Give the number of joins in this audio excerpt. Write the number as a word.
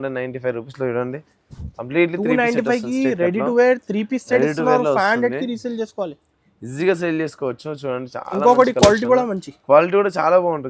zero